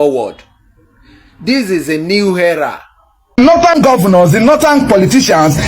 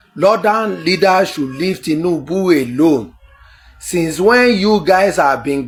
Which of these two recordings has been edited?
first; 1 cut; at 3.4 s

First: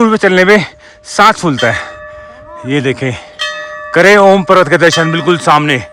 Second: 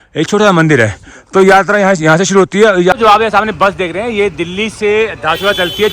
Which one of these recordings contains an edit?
second; 1 cut; at 2.9 s

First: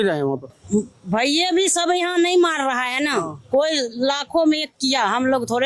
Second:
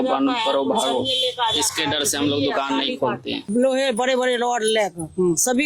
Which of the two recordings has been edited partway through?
second; 1 cut; at 3.4 s

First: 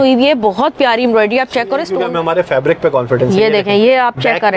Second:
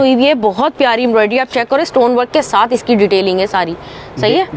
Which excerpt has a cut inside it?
first; 1 cut; at 1.9 s

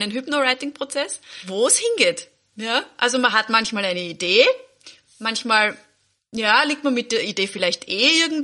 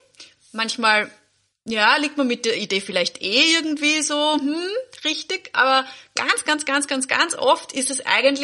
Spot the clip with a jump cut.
first; 1 cut; at 1.4 s

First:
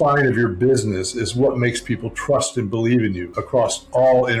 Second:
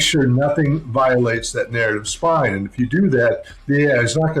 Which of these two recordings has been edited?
first; 1 cut; at 3.3 s

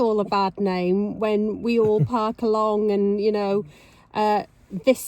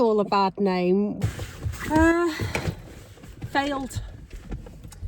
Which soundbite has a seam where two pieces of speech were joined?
second; 1 cut; at 1.1 s

